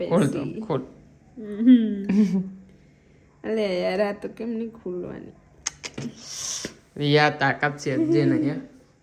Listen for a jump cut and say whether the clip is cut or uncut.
uncut